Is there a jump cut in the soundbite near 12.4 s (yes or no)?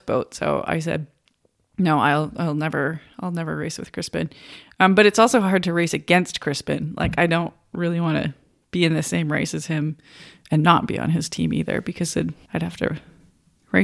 yes